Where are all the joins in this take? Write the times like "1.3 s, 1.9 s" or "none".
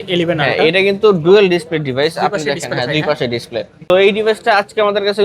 3.8 s